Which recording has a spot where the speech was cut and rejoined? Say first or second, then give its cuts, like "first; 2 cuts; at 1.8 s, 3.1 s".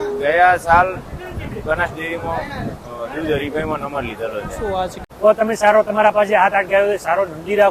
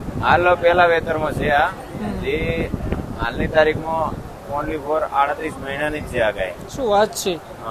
first; 1 cut; at 5.0 s